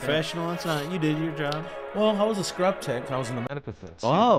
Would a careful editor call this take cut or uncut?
uncut